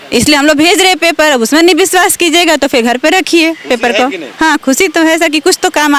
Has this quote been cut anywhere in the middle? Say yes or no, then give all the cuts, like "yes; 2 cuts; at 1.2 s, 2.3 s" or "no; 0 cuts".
no; 0 cuts